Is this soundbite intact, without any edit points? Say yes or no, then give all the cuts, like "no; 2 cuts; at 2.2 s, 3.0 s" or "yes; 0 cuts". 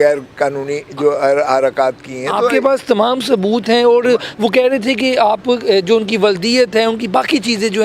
yes; 0 cuts